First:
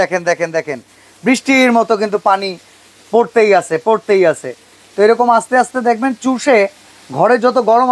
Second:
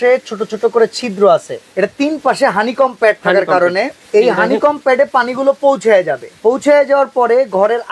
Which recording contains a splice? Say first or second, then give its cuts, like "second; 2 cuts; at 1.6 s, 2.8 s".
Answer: second; 3 cuts; at 1.6 s, 4.0 s, 6.2 s